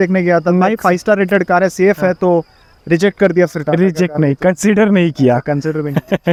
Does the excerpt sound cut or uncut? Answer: uncut